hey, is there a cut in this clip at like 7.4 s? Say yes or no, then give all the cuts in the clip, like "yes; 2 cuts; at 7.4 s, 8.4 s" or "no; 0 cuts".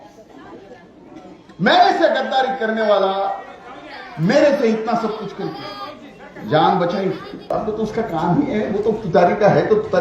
yes; 1 cut; at 7.4 s